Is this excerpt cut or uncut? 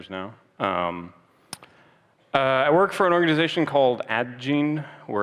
cut